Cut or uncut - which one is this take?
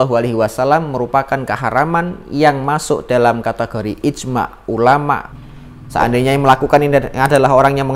cut